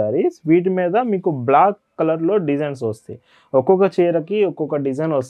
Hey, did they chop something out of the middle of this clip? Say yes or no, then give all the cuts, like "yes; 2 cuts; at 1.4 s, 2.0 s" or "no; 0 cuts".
no; 0 cuts